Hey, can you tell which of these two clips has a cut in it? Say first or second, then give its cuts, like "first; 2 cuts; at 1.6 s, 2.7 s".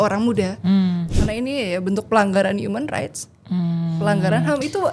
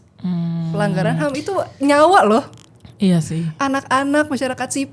first; 1 cut; at 1.1 s